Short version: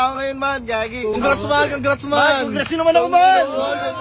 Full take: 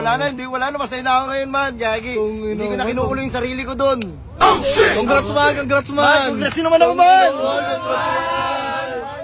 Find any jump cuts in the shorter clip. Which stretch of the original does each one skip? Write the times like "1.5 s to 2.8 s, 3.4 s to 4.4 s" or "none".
2.3 s to 5.0 s